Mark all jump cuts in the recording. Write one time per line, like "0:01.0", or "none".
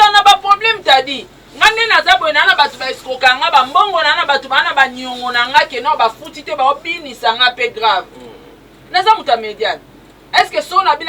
none